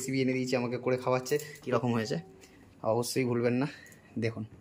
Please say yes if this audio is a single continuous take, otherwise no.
no